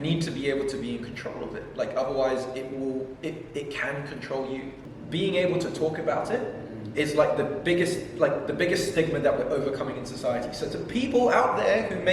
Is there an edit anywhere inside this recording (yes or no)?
yes